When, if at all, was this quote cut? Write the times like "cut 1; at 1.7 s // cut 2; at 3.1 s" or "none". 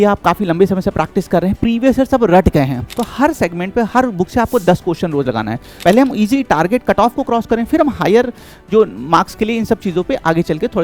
cut 1; at 2.9 s // cut 2; at 5.7 s